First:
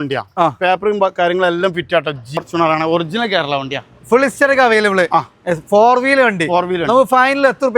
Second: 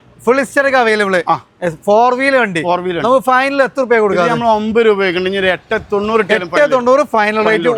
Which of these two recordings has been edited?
first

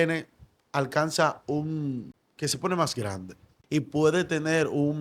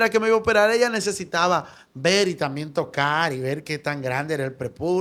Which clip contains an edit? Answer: first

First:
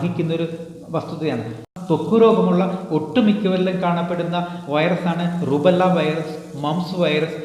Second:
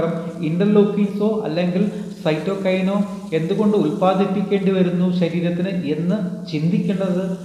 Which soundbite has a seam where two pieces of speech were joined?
first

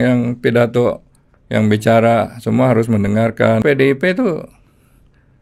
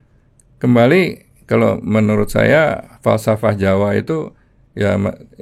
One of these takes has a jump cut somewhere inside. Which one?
first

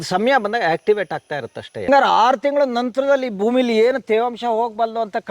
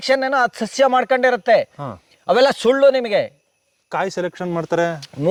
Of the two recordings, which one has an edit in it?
first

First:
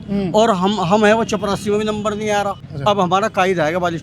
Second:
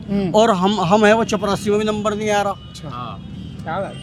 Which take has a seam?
first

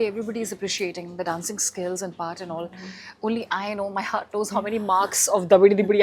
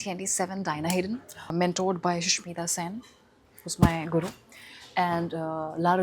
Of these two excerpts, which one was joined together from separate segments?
second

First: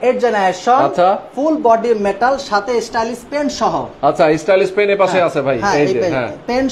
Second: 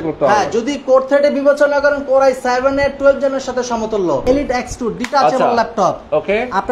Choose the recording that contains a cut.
second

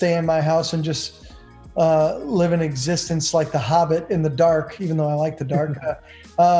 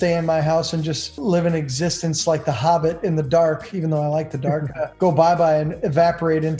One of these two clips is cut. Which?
second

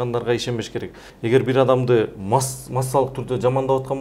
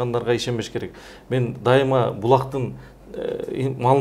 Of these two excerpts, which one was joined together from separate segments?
first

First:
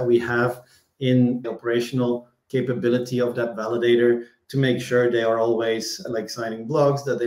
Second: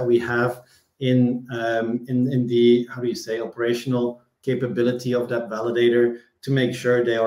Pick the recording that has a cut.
first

